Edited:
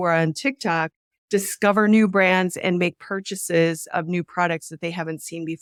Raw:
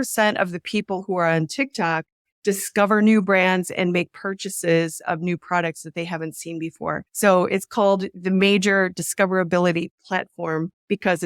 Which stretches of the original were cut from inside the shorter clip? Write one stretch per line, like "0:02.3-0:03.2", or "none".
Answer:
none